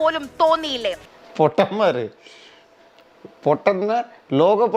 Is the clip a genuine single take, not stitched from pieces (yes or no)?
yes